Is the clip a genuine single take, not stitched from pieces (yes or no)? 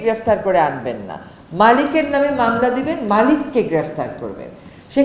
yes